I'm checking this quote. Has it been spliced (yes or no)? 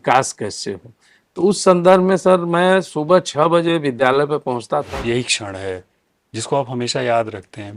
yes